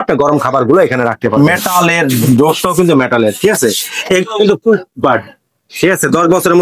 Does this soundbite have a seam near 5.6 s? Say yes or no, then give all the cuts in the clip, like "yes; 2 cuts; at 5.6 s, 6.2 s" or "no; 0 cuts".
no; 1 cut; at 1.4 s